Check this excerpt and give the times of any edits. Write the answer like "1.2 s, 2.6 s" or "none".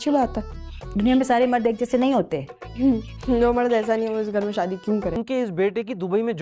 5.1 s